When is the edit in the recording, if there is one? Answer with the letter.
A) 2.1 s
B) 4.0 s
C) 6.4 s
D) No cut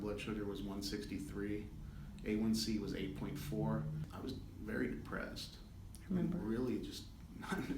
B